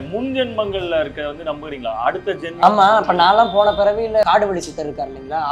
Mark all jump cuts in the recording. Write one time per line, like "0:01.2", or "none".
0:04.2